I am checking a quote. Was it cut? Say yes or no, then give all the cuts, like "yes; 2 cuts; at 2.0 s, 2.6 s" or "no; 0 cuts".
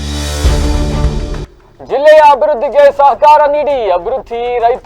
yes; 1 cut; at 1.5 s